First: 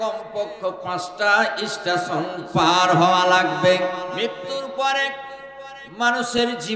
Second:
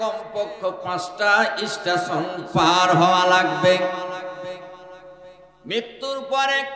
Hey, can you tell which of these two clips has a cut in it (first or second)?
first